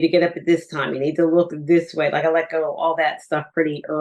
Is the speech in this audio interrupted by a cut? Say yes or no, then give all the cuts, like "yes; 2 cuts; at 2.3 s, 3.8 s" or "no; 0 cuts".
no; 0 cuts